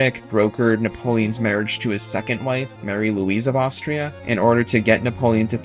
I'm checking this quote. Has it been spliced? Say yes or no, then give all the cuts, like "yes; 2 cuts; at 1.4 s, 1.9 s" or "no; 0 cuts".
yes; 2 cuts; at 2.7 s, 4.1 s